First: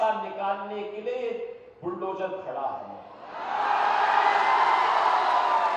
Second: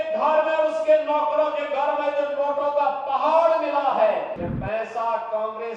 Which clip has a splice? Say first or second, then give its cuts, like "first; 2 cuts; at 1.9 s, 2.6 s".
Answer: second; 1 cut; at 4.4 s